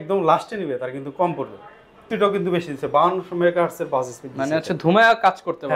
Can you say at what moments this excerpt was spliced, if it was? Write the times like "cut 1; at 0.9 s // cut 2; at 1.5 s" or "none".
cut 1; at 2.0 s